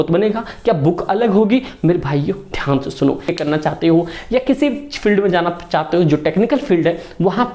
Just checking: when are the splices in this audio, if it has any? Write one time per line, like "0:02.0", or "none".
0:03.3